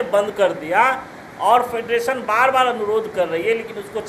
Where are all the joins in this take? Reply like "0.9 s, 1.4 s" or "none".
none